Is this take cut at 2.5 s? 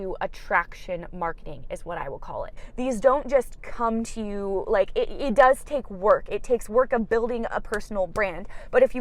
yes; 1 cut; at 2.5 s

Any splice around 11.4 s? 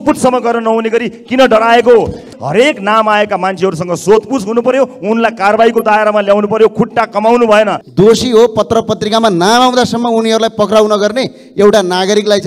no; 2 cuts; at 2.4 s, 7.8 s

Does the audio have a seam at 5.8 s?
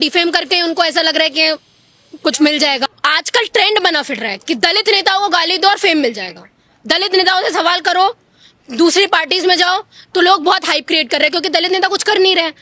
no; 1 cut; at 2.9 s

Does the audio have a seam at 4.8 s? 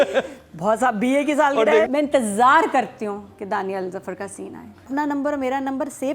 yes; 2 cuts; at 1.9 s, 4.8 s

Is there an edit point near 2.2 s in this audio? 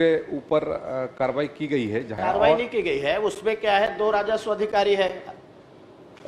yes; 1 cut; at 2.2 s

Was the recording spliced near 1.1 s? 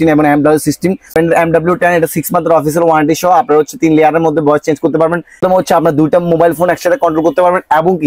yes; 2 cuts; at 1.1 s, 5.4 s

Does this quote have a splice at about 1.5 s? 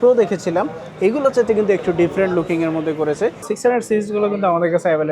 no; 1 cut; at 3.5 s

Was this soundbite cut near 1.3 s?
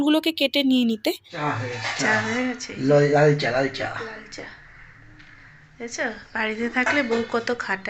yes; 1 cut; at 1.3 s

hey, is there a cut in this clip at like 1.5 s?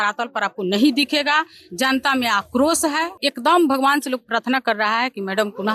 no; 1 cut; at 3.1 s

